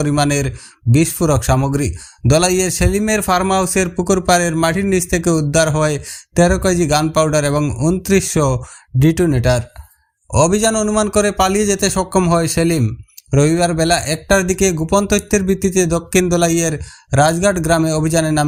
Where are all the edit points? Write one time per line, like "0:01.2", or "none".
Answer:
none